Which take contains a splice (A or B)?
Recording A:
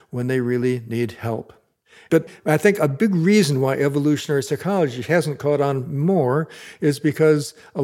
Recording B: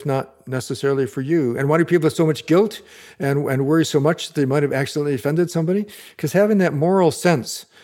A